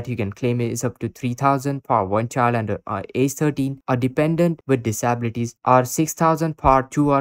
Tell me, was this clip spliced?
no; 0 cuts

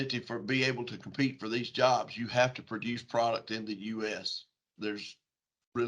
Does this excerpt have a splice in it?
yes; 1 cut; at 4.7 s

